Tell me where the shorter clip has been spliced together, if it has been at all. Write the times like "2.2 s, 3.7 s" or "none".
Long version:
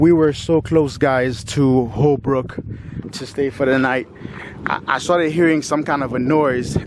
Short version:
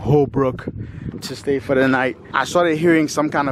2.3 s